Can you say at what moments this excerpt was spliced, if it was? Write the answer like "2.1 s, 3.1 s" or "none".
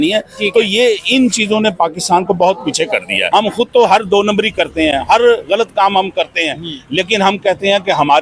3.2 s